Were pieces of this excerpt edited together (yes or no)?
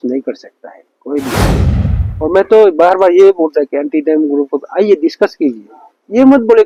no